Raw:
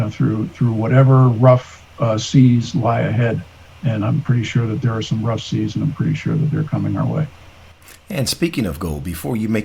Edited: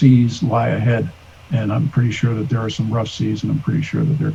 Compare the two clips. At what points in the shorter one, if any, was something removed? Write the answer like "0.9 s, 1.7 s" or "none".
none